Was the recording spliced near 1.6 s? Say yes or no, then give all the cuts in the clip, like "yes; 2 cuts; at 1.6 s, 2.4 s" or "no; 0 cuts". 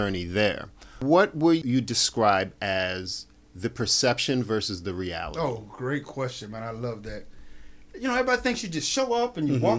yes; 2 cuts; at 1.0 s, 1.6 s